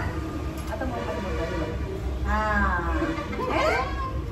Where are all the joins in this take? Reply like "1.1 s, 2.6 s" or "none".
none